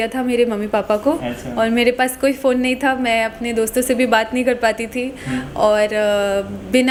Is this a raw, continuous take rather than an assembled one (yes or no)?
yes